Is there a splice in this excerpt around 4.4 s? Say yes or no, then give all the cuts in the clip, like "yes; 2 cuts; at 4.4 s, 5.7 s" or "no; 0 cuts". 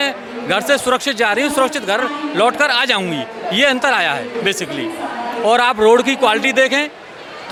no; 0 cuts